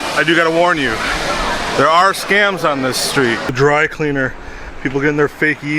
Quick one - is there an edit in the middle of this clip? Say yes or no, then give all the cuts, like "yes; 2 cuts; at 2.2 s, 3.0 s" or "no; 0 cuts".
yes; 1 cut; at 3.5 s